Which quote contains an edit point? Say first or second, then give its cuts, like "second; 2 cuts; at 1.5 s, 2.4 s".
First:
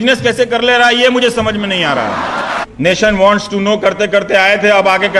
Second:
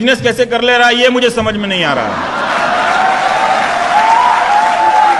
first; 1 cut; at 2.6 s